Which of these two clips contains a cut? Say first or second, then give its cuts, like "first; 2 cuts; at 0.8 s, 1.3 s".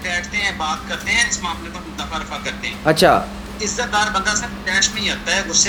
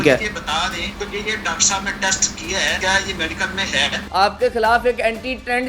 second; 3 cuts; at 0.9 s, 2.8 s, 4.0 s